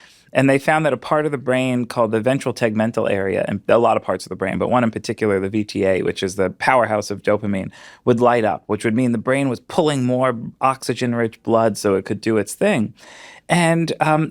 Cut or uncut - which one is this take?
uncut